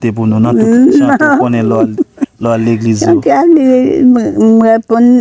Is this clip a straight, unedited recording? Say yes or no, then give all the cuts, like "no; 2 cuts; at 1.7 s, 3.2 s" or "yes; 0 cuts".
yes; 0 cuts